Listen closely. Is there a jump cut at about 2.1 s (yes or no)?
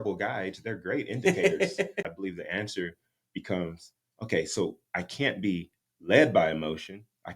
yes